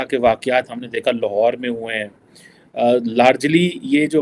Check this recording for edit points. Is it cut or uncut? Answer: uncut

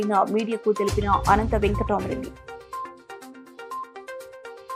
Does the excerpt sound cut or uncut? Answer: uncut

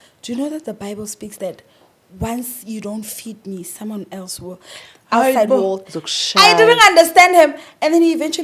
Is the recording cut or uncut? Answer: uncut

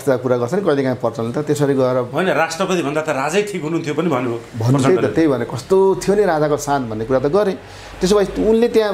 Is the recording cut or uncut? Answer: uncut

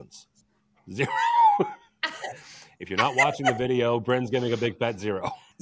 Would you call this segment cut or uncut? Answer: uncut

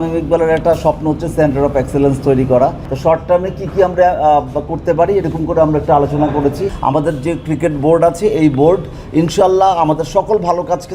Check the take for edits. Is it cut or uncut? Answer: cut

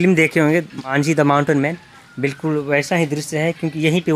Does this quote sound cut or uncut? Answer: cut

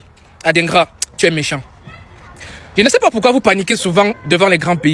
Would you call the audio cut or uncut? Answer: uncut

